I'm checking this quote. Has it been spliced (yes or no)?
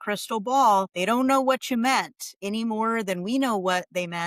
yes